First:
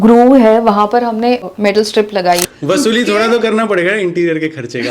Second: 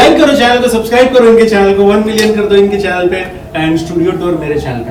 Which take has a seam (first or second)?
first